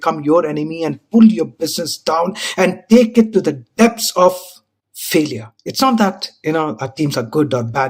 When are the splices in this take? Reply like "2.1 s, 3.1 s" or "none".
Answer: 5.5 s